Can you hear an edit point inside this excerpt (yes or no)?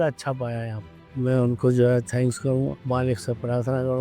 yes